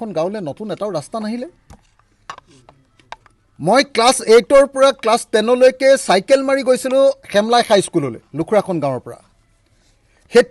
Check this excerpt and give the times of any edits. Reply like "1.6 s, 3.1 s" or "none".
none